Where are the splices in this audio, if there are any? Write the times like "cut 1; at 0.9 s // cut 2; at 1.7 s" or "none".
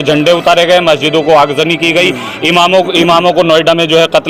none